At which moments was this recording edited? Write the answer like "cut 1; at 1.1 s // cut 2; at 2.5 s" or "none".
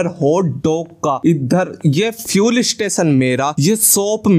cut 1; at 1.2 s // cut 2; at 3.5 s